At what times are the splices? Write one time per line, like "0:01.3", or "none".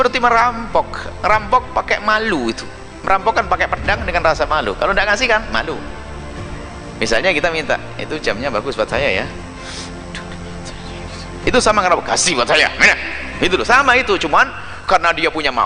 none